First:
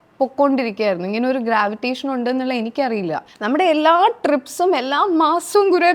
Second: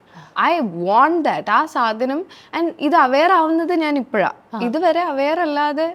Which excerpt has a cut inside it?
first; 1 cut; at 3.3 s

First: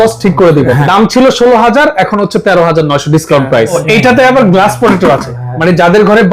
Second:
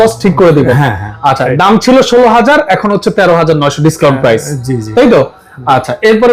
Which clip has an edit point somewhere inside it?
first; 2 cuts; at 0.8 s, 3.8 s

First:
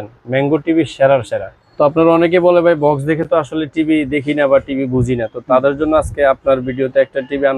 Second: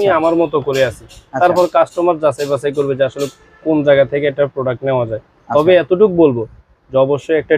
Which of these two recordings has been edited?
first; 1 cut; at 1.6 s

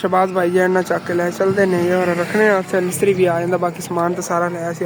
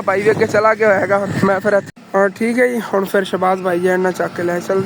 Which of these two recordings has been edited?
second; 1 cut; at 1.8 s

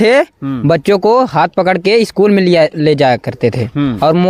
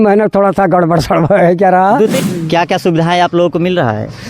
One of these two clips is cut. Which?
second; 1 cut; at 2.2 s

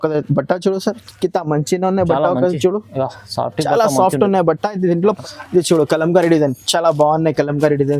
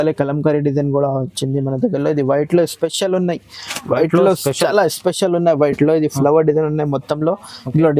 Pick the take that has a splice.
first; 1 cut; at 5.0 s

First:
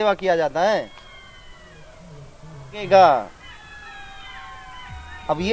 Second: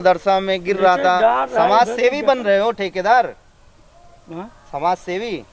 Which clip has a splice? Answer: first; 1 cut; at 2.8 s

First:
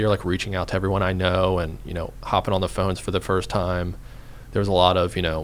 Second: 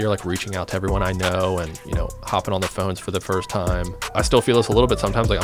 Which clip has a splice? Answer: second; 1 cut; at 4.0 s

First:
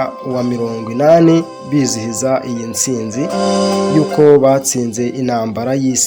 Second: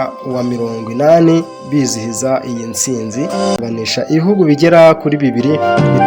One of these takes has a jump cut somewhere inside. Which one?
second; 1 cut; at 3.6 s

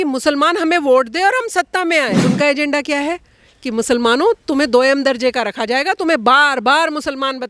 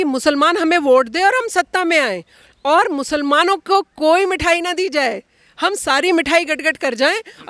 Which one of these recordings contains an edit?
first; 1 cut; at 2.2 s

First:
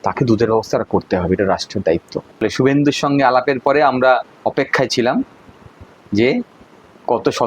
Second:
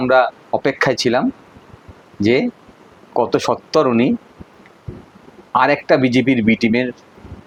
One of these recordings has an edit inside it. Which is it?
first; 1 cut; at 2.4 s

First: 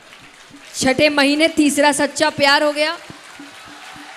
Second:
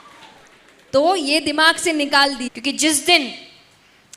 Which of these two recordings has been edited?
second; 1 cut; at 2.5 s

